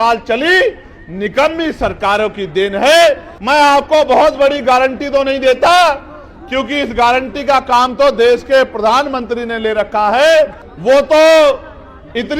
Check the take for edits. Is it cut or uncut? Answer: cut